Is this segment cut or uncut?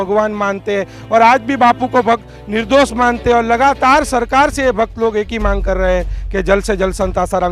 uncut